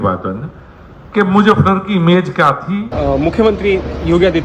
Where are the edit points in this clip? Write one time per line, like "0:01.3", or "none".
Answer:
0:02.9